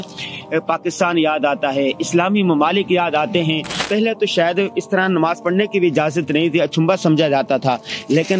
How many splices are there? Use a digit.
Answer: 1